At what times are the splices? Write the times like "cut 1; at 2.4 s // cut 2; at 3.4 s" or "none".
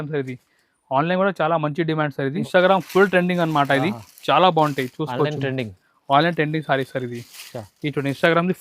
cut 1; at 2.5 s